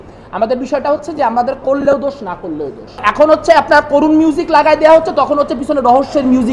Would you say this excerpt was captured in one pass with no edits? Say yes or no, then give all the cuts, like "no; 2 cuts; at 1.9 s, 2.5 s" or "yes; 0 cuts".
no; 1 cut; at 3.0 s